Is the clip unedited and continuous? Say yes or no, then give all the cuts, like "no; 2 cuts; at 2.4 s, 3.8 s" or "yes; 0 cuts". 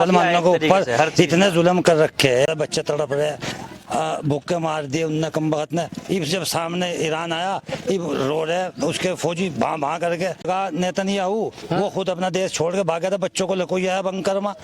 no; 2 cuts; at 2.5 s, 10.4 s